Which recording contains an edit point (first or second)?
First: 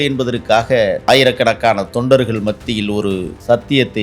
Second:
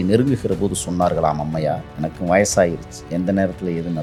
first